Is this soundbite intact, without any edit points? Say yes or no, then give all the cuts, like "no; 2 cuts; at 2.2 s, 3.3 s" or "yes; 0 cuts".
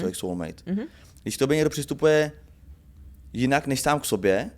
yes; 0 cuts